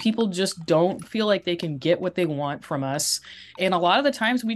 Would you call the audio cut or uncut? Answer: cut